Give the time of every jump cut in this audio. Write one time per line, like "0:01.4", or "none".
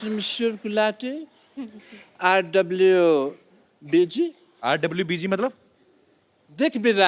none